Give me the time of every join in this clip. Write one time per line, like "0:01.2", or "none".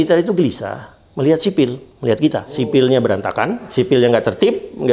0:02.6
0:03.7